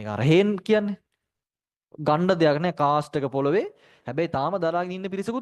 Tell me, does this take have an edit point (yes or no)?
no